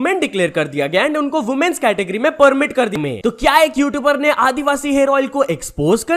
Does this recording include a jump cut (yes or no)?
yes